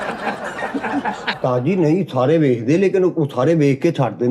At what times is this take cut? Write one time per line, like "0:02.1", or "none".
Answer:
0:01.3